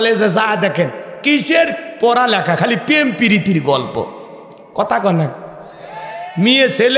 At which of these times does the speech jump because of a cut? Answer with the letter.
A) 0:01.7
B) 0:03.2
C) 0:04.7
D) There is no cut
D